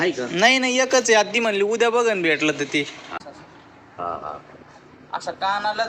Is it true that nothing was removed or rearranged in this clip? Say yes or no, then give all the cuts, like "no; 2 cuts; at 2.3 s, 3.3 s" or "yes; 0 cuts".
no; 1 cut; at 3.2 s